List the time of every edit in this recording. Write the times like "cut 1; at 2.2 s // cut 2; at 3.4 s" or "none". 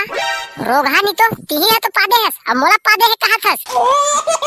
cut 1; at 3.5 s

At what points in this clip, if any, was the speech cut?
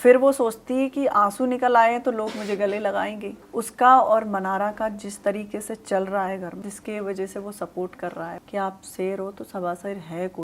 cut 1; at 3.3 s // cut 2; at 6.6 s // cut 3; at 8.4 s

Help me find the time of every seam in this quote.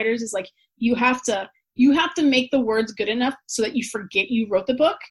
none

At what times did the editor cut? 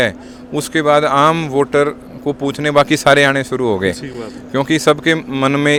none

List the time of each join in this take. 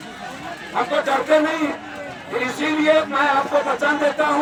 none

